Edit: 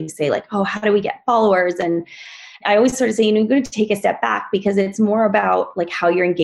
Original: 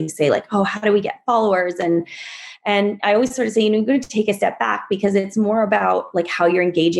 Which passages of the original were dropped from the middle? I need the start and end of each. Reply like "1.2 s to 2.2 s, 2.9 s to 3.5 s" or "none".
2.6 s to 3.0 s